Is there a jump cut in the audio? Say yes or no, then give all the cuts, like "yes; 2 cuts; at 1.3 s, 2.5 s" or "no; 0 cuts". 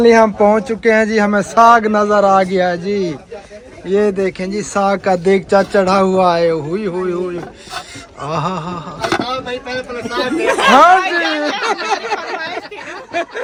no; 0 cuts